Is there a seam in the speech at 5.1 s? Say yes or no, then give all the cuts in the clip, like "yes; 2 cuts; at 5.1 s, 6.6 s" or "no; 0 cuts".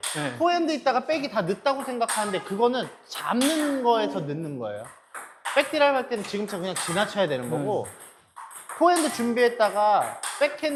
no; 0 cuts